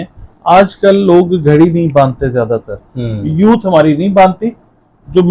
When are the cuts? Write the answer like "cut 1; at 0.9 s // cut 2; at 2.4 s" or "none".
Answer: none